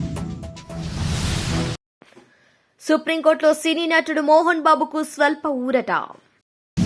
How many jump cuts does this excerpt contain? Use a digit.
0